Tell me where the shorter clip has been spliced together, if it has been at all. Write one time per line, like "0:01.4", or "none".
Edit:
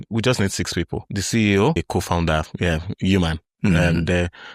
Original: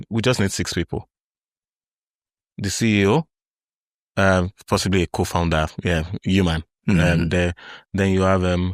0:01.0
0:01.8